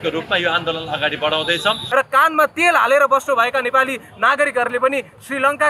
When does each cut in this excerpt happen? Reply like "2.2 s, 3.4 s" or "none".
1.8 s